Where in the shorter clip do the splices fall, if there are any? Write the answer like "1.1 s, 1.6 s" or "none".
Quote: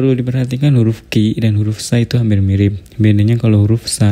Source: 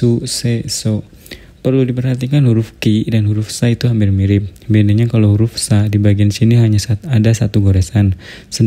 none